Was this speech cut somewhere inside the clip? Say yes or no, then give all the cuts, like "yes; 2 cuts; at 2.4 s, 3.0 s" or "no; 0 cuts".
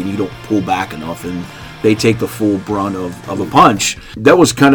no; 0 cuts